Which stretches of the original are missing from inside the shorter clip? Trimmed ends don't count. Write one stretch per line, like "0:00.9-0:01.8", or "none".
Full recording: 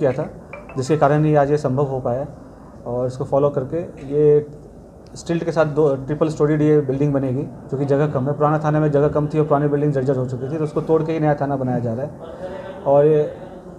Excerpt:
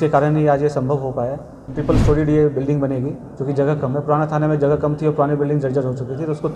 0:02.6-0:06.1